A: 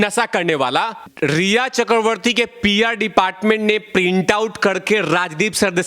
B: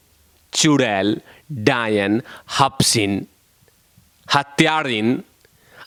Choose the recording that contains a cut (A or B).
A